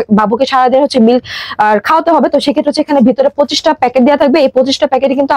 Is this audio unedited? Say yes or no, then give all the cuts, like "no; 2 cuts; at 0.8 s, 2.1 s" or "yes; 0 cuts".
yes; 0 cuts